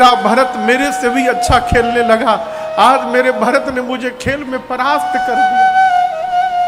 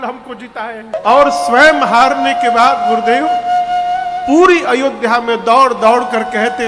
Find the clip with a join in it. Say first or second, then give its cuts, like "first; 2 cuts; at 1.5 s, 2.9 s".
second; 1 cut; at 0.9 s